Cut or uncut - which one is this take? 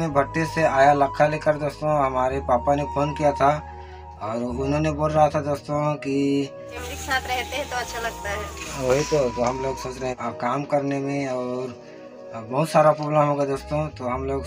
cut